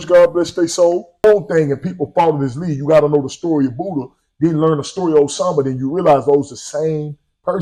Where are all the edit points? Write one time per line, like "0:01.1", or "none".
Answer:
0:01.2